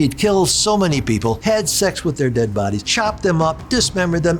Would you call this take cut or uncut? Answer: cut